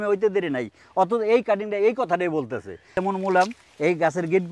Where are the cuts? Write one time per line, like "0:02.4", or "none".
0:02.9